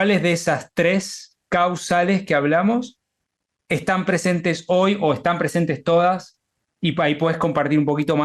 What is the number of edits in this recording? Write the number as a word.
zero